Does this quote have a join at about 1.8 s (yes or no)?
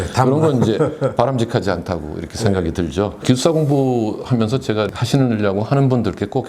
no